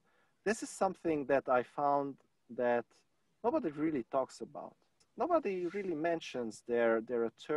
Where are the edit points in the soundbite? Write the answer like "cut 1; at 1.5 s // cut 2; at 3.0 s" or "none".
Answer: cut 1; at 4.9 s

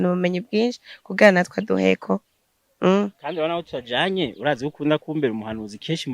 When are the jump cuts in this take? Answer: none

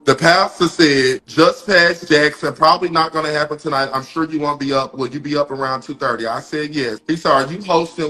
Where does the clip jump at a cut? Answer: none

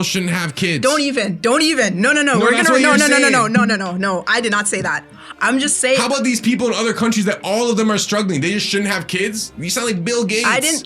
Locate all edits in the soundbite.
none

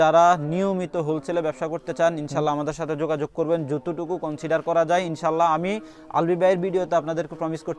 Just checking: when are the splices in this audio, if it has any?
none

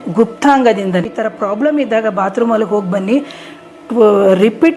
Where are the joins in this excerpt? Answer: cut 1; at 1.1 s

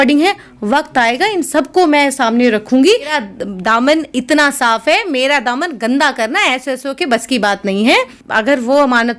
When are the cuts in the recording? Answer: cut 1; at 3.2 s // cut 2; at 8.0 s

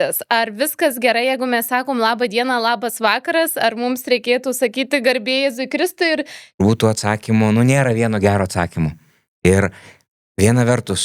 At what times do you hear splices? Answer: cut 1; at 6.6 s

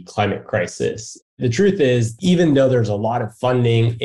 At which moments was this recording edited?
cut 1; at 1.3 s // cut 2; at 2.1 s

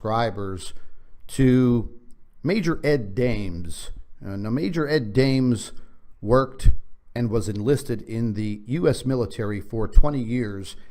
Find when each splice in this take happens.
cut 1; at 8.8 s

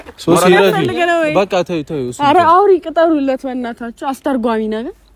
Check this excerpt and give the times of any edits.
none

